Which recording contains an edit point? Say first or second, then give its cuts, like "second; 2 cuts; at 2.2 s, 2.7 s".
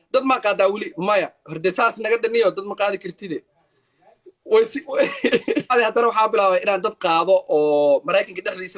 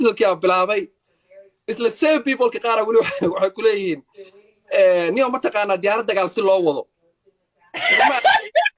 first; 1 cut; at 5.7 s